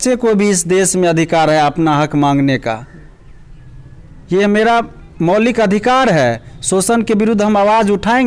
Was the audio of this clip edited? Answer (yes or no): no